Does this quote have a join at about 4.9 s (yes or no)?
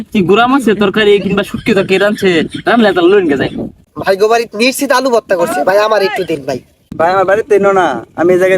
no